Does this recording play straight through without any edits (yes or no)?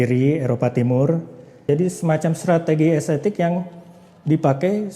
no